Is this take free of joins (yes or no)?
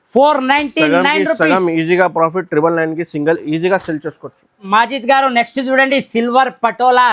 yes